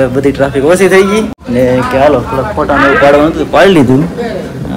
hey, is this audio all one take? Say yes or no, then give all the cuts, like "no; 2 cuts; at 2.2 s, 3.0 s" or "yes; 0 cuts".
no; 1 cut; at 1.4 s